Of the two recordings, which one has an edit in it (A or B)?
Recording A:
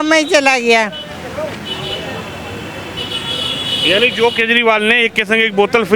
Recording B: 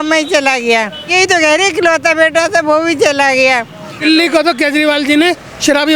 B